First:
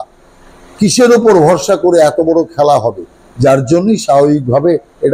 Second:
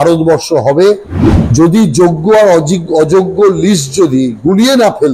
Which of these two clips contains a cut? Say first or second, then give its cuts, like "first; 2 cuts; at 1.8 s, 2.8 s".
second; 1 cut; at 1.1 s